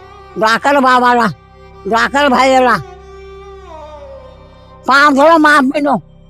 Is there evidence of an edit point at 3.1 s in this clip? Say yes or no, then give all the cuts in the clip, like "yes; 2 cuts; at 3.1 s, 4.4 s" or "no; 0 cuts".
yes; 2 cuts; at 3.1 s, 4.8 s